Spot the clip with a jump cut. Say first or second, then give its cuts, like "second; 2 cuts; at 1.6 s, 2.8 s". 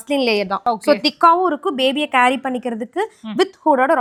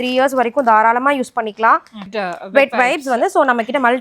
second; 1 cut; at 2.0 s